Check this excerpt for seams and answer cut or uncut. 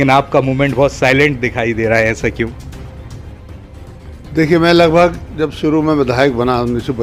uncut